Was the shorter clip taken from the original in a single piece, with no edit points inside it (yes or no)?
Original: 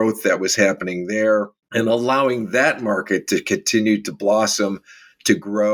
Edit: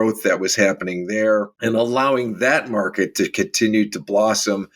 no